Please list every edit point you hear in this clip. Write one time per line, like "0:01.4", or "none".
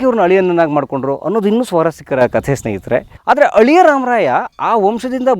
0:03.1